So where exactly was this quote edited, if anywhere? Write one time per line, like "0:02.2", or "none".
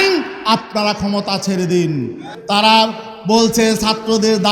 0:02.3